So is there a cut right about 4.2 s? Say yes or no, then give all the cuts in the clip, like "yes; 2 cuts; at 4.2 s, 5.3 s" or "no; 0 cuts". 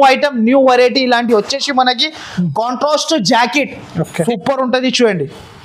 yes; 1 cut; at 4.2 s